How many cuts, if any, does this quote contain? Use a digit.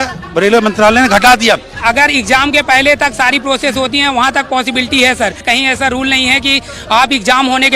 2